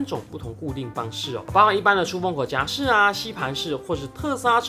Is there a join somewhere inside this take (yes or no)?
no